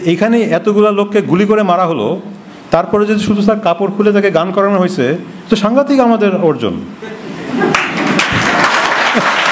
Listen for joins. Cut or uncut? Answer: uncut